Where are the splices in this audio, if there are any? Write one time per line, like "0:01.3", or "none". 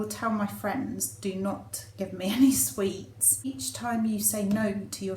0:03.6